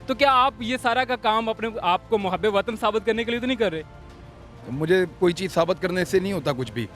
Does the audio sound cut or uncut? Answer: uncut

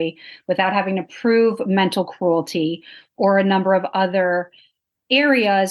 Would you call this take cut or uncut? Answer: uncut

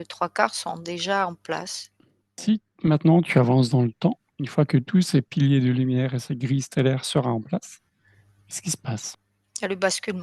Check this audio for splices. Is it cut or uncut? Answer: cut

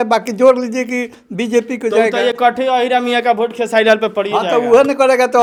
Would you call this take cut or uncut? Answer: uncut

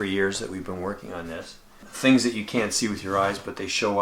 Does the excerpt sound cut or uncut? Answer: cut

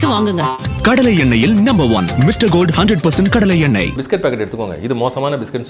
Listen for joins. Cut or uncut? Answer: cut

